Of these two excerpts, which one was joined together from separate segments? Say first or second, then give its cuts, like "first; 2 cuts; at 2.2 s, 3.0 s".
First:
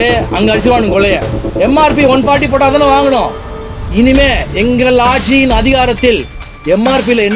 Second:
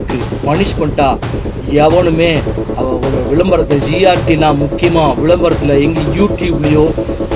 first; 1 cut; at 1.4 s